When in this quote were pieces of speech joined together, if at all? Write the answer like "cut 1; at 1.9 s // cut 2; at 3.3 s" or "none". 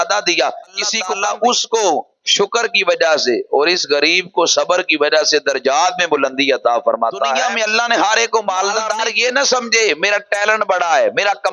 cut 1; at 1.0 s // cut 2; at 8.8 s